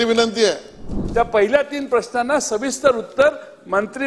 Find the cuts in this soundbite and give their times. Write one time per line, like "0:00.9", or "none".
0:01.0